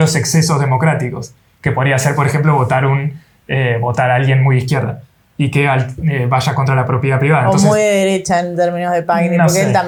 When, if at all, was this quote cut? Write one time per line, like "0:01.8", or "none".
none